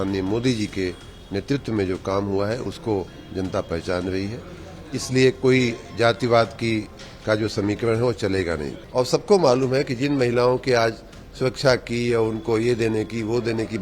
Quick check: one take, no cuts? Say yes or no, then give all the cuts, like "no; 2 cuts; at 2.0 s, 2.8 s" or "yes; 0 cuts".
no; 1 cut; at 8.7 s